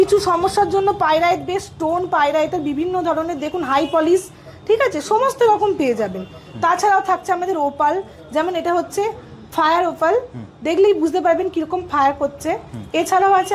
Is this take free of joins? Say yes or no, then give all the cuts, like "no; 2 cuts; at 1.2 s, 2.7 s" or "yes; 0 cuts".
yes; 0 cuts